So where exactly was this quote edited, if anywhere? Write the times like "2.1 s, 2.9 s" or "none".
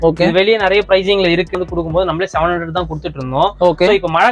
1.5 s